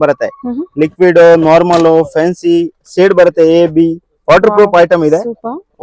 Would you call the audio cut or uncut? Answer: uncut